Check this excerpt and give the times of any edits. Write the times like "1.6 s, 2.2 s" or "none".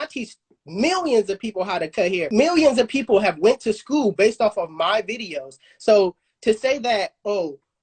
2.3 s